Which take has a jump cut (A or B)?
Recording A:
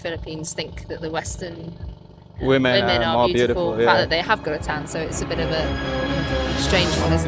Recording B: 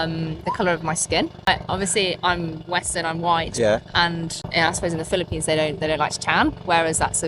B